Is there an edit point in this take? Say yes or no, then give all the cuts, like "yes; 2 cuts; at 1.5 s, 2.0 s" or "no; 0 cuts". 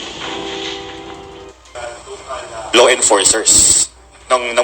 yes; 1 cut; at 1.8 s